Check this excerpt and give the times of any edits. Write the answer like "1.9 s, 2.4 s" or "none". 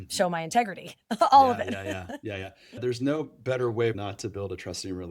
2.8 s, 4.0 s